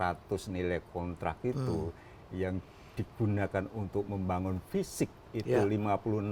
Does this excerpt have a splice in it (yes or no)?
no